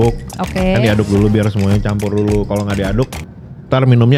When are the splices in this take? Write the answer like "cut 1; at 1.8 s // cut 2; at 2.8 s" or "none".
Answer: none